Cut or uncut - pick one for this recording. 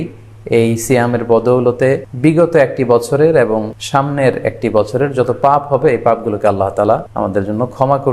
cut